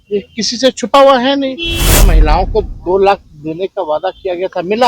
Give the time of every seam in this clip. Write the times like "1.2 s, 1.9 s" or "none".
2.1 s